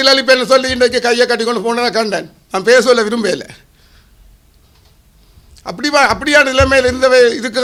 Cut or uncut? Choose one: uncut